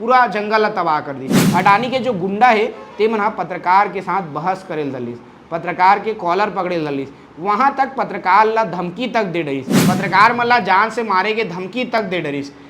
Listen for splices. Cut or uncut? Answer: cut